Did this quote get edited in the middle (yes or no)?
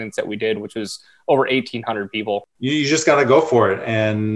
yes